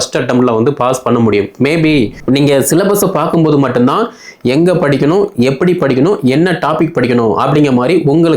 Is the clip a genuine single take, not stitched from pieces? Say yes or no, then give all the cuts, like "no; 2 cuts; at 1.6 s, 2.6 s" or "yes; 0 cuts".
no; 1 cut; at 2.2 s